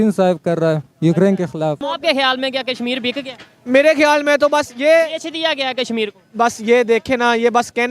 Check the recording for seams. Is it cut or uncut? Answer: cut